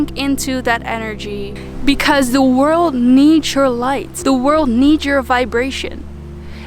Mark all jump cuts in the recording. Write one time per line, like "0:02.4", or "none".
0:01.6
0:04.1